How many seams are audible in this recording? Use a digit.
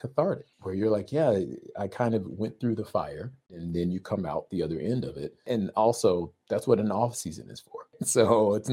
0